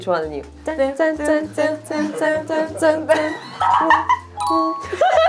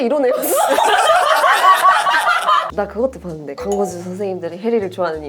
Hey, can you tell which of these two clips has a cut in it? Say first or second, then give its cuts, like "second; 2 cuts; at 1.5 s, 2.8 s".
second; 1 cut; at 2.7 s